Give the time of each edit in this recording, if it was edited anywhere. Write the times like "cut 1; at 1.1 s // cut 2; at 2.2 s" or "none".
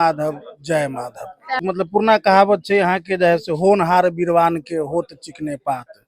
cut 1; at 1.6 s